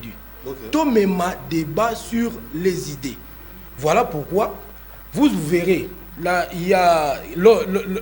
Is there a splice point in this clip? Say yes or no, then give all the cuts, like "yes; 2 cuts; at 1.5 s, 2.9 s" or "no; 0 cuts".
no; 0 cuts